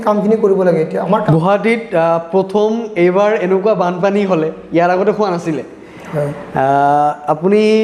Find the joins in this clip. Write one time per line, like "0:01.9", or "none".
0:01.2